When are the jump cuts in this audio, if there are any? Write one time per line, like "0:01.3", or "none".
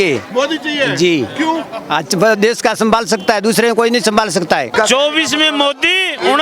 0:04.7